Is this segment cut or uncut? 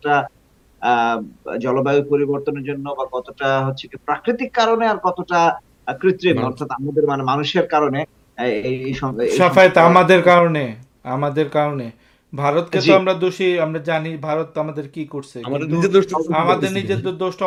uncut